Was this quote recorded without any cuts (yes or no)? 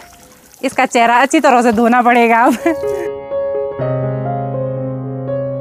yes